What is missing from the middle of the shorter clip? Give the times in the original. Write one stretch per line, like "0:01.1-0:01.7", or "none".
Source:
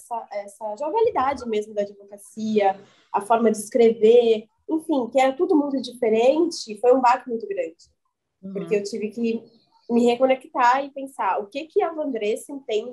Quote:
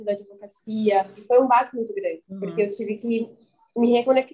0:02.9-0:06.7
0:07.8-0:08.4